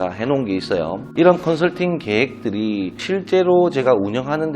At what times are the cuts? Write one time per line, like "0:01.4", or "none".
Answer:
0:01.1